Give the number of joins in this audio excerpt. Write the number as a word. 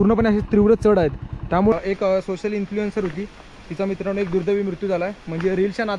one